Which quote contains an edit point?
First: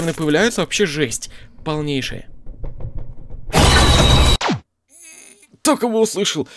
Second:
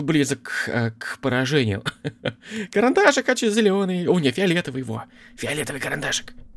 first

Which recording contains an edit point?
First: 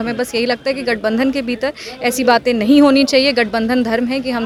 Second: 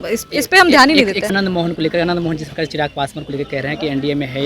second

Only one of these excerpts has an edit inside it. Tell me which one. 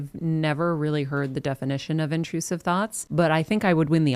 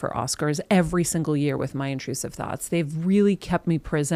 first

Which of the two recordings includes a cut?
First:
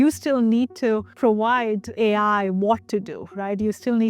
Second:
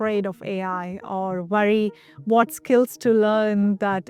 first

